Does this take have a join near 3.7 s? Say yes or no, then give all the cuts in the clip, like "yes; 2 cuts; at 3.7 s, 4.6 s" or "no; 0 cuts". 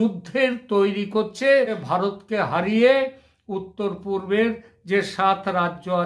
no; 1 cut; at 1.8 s